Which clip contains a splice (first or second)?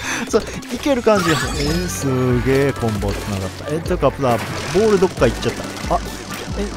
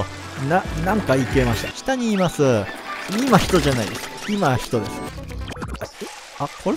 second